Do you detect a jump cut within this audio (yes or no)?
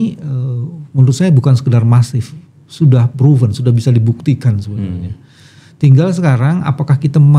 no